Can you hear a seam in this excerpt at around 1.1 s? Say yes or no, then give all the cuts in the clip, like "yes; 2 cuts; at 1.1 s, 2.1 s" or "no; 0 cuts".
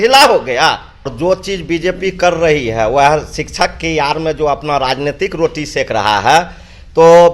yes; 1 cut; at 1.1 s